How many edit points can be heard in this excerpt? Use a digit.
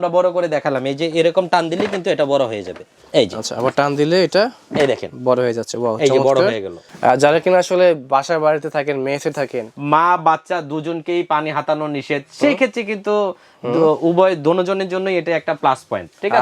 2